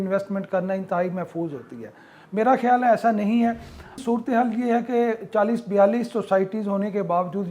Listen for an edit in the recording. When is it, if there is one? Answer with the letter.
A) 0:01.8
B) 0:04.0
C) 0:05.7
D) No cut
B